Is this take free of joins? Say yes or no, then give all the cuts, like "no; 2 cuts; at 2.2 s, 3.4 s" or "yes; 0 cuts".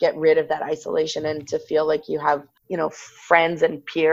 no; 1 cut; at 2.6 s